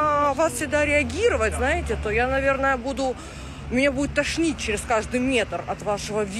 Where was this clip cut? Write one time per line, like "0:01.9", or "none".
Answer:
none